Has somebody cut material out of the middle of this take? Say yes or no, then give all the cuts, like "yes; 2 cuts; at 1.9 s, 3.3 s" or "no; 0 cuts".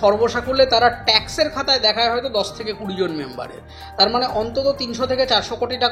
no; 0 cuts